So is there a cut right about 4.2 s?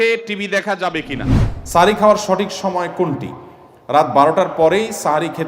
no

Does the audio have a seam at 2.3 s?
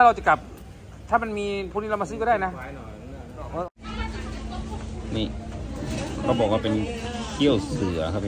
no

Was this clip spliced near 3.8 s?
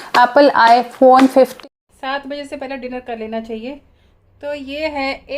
no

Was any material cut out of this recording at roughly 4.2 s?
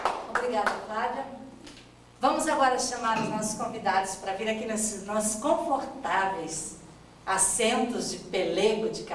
no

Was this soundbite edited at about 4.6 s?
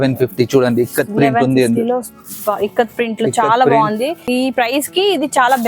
yes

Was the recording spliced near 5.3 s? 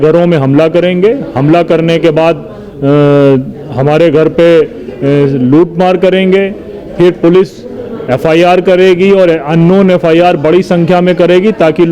no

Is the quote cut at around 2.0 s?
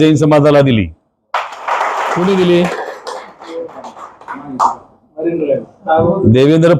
yes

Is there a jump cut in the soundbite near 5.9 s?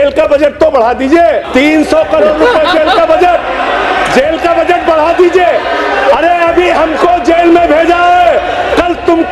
no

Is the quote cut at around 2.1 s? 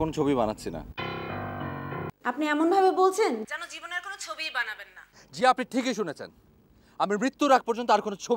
yes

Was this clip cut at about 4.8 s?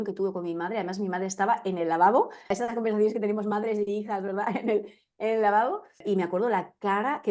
no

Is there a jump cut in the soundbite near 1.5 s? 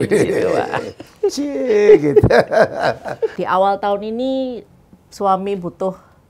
no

